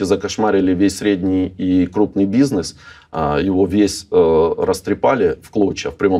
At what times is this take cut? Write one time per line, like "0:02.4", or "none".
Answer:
none